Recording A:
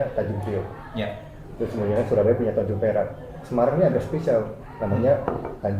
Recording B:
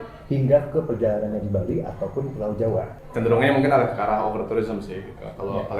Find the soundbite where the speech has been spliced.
B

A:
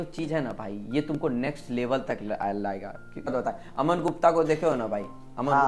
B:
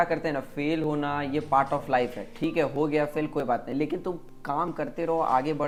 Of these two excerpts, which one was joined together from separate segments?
A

